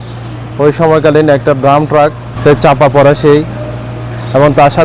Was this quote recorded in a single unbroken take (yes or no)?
no